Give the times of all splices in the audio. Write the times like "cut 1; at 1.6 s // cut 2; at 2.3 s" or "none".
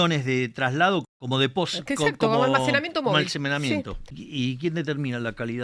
cut 1; at 1.1 s // cut 2; at 4.1 s